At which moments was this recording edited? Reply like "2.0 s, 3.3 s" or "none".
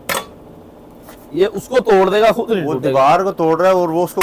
none